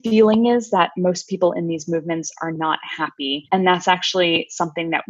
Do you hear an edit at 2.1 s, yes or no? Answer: no